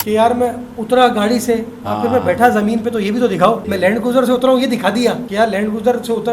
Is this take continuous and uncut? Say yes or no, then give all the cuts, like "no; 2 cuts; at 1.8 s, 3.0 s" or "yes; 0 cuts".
no; 2 cuts; at 3.7 s, 5.2 s